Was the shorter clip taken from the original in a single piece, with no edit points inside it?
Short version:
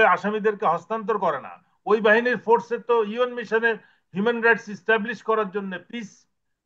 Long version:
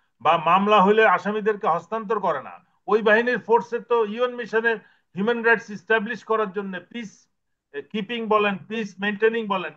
yes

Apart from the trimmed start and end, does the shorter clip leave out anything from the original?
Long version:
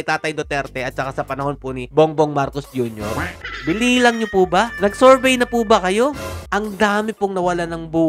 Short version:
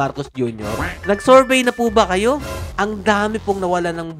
yes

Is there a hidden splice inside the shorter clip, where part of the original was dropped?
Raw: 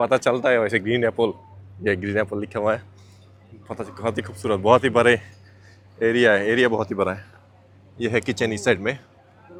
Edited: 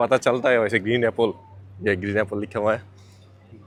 no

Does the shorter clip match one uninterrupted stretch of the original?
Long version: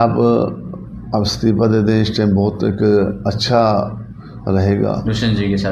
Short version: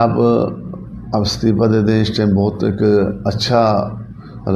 yes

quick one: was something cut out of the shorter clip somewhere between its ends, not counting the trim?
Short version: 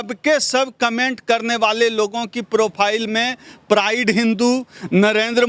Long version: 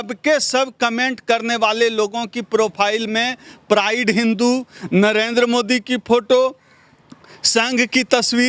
no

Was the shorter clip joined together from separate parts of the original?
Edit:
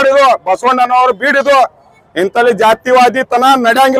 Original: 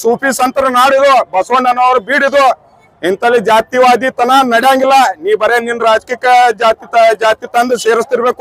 no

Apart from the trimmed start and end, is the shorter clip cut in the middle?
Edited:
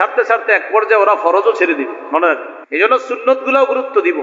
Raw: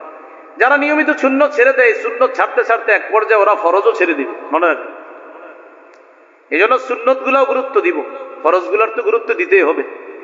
yes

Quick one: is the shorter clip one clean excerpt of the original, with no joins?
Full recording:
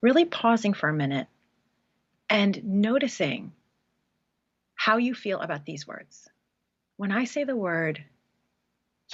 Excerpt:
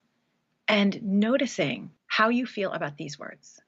no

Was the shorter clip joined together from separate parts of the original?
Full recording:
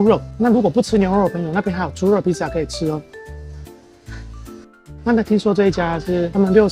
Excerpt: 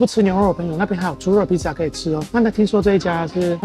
yes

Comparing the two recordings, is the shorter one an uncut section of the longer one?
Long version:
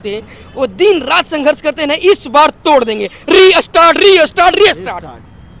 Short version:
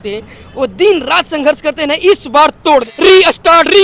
no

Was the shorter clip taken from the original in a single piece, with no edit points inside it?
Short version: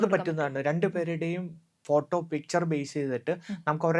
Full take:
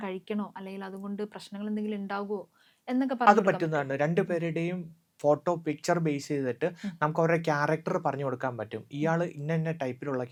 yes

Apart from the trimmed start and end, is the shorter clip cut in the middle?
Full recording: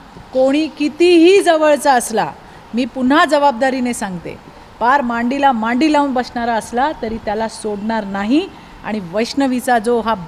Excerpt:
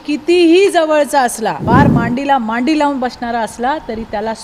yes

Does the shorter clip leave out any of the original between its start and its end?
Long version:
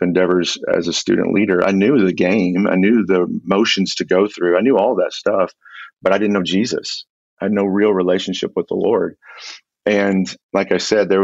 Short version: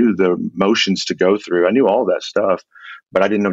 no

